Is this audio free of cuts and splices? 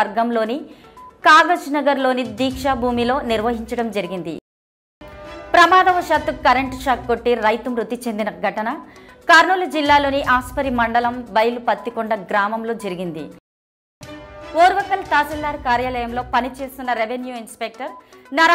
no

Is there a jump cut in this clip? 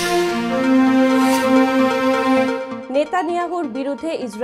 yes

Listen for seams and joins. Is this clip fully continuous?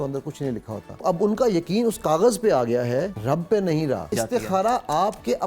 no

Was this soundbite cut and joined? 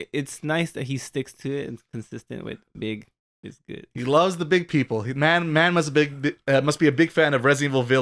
no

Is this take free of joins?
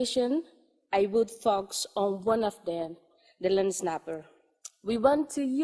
no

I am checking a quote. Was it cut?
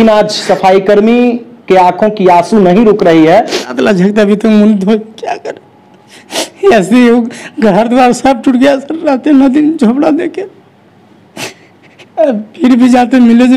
yes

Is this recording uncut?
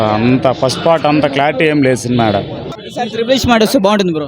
no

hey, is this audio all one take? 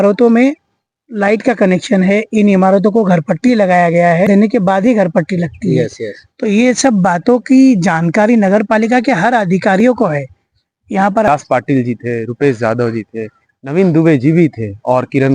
no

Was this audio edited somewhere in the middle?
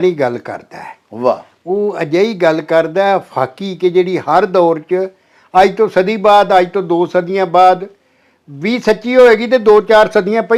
no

